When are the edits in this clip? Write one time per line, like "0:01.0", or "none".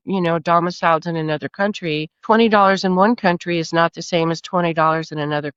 none